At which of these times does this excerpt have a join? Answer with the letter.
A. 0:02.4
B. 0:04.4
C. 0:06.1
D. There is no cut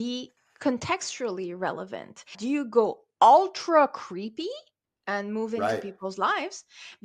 A